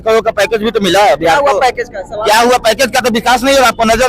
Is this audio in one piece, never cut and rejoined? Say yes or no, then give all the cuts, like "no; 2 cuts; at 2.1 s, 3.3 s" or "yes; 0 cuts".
yes; 0 cuts